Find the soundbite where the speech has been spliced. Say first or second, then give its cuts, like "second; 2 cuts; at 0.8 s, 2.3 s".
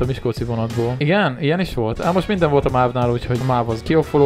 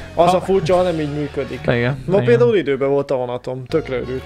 first; 2 cuts; at 1.0 s, 3.4 s